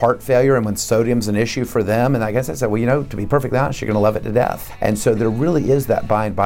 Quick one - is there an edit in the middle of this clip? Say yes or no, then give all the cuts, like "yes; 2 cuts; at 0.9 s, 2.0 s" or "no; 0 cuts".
yes; 1 cut; at 4.7 s